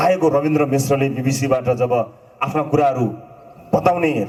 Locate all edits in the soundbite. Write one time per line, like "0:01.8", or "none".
none